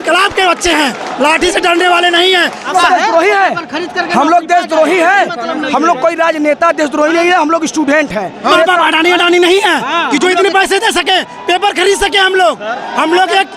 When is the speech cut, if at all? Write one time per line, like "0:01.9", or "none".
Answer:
0:02.7
0:08.5